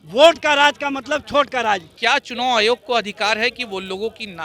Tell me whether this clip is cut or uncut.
cut